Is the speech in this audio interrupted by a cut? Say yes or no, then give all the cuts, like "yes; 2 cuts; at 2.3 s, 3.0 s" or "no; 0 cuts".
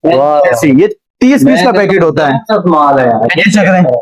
no; 0 cuts